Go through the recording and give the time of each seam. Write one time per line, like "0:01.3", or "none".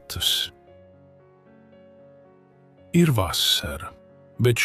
0:01.0
0:02.9

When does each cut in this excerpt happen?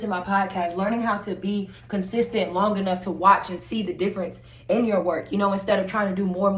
none

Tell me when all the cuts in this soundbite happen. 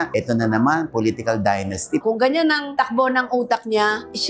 0:02.0

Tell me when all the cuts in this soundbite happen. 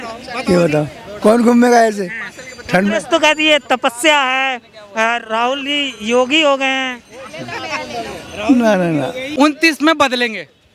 0:09.2

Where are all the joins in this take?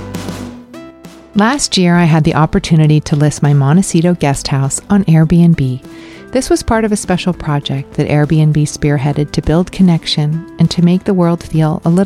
none

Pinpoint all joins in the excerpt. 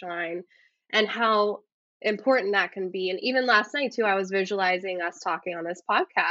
none

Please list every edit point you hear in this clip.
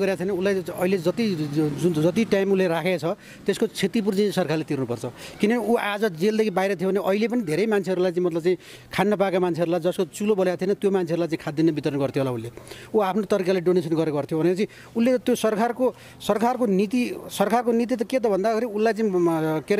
none

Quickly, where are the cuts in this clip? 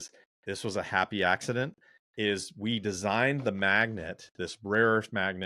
none

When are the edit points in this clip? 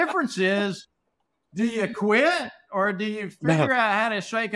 none

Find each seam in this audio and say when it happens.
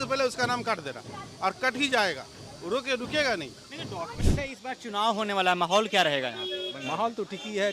0:04.1

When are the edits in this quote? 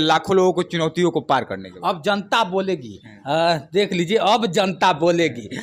none

